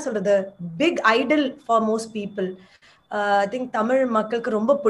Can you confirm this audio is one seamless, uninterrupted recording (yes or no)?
yes